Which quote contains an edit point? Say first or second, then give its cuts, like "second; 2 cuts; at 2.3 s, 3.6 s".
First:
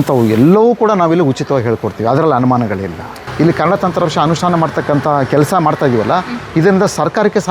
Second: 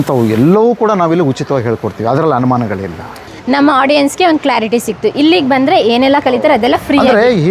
first; 1 cut; at 3.2 s